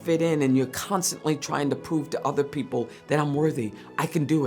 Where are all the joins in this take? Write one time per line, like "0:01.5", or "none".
none